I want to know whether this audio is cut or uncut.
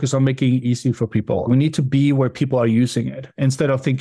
uncut